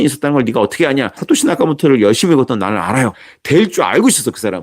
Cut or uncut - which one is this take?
cut